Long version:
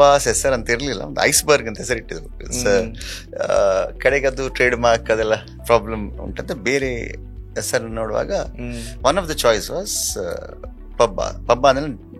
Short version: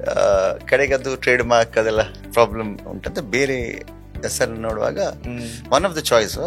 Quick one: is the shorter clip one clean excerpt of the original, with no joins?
yes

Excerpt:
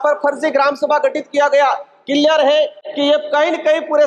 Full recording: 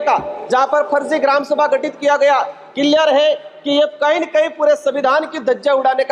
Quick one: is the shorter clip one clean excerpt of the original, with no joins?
yes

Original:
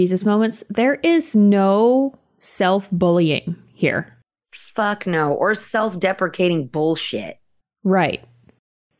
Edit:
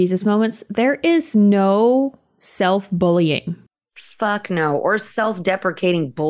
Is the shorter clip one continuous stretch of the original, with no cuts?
no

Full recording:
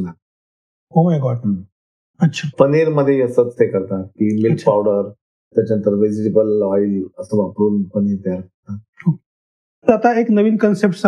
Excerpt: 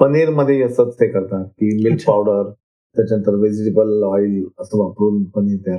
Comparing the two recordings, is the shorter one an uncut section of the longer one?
yes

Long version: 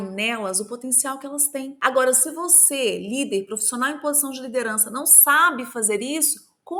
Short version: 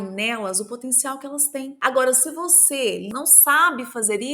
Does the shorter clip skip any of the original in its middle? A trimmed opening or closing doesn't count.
yes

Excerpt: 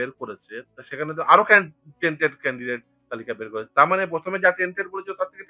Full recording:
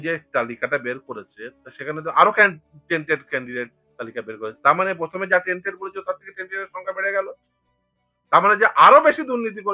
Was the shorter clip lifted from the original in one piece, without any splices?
yes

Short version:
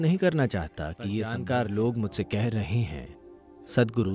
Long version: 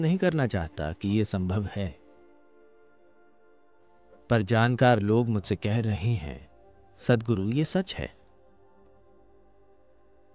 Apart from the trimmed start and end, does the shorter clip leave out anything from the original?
yes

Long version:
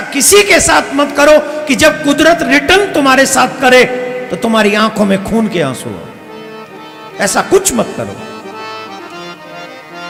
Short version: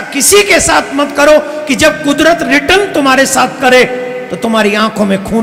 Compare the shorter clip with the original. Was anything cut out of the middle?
no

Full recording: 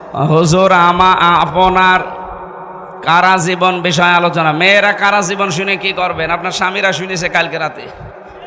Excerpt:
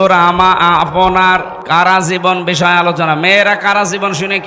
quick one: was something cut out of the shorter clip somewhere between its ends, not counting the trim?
yes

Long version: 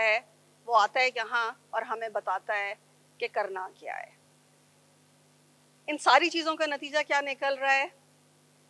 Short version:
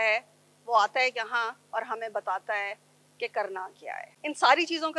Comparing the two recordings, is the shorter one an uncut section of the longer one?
no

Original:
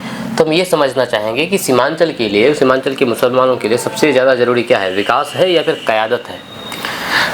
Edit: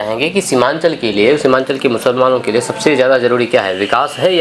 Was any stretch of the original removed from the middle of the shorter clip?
no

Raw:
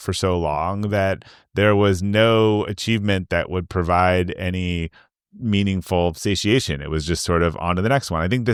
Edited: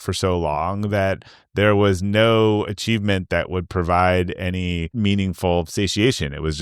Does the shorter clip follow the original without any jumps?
no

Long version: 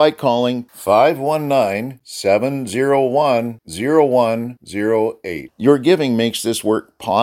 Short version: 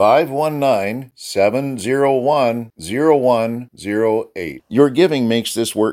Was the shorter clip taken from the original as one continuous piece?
yes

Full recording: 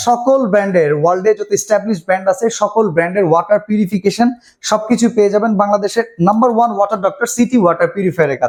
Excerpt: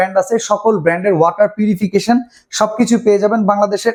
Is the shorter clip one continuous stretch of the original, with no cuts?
yes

